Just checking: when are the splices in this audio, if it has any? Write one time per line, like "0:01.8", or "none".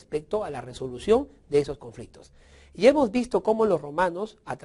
0:01.6